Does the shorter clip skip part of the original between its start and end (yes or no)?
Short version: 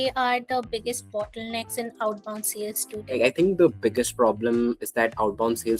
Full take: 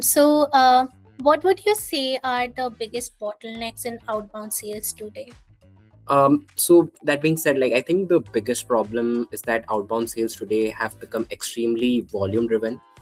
yes